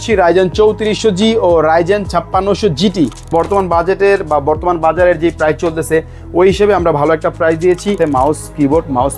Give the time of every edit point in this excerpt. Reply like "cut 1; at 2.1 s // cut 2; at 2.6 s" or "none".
cut 1; at 3.3 s // cut 2; at 8.0 s